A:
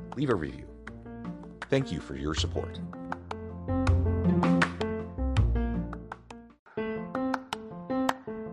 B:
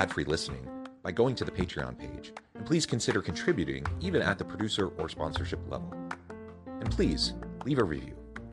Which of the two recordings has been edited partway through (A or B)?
A